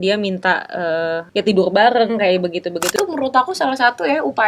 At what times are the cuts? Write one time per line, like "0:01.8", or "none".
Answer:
0:01.2
0:02.9